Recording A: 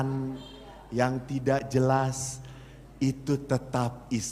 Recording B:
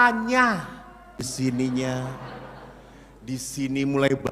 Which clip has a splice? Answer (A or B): B